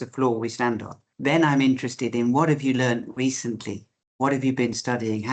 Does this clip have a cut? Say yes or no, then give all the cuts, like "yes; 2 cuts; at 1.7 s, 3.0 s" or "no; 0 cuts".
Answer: no; 0 cuts